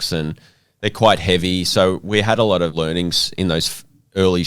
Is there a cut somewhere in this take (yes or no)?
yes